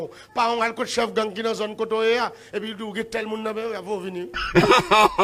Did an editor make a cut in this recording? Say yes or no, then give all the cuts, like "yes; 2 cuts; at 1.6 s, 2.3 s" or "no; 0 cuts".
yes; 1 cut; at 4.3 s